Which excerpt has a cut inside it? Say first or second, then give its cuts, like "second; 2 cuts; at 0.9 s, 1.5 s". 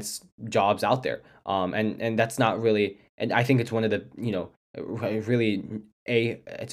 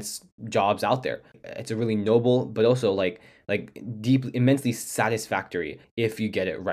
second; 2 cuts; at 1.4 s, 5.8 s